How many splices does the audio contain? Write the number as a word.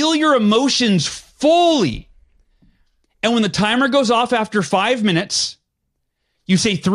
zero